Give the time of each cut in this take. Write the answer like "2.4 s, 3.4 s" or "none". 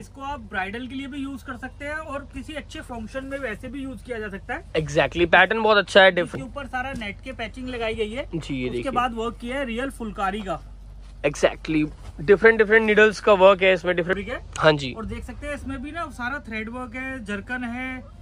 6.3 s, 14.1 s